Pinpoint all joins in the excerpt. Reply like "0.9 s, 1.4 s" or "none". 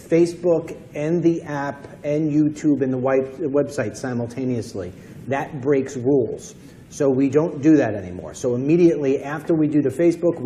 3.7 s